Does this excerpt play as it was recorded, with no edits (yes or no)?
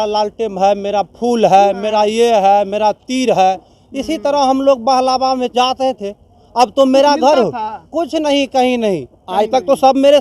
yes